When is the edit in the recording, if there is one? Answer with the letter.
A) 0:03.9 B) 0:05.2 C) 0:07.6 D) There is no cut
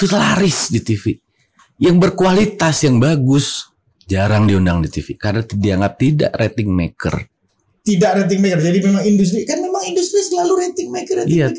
D